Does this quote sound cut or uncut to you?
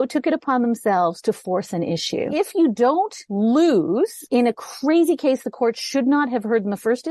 cut